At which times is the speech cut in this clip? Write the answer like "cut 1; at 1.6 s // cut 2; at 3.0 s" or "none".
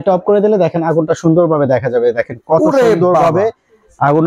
none